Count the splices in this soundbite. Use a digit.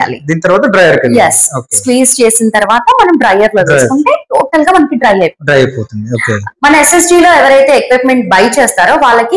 1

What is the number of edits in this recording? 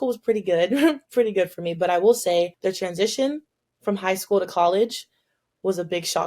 1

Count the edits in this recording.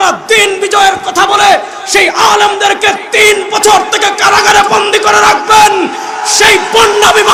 0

